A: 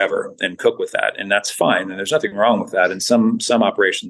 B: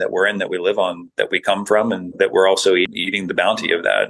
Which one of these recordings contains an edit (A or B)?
B